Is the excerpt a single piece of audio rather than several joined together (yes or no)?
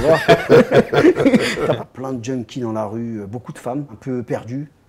no